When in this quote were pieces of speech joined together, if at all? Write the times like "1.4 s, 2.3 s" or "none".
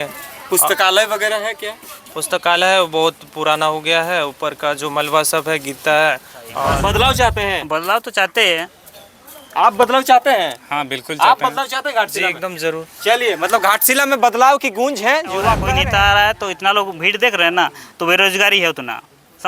6.6 s, 15.6 s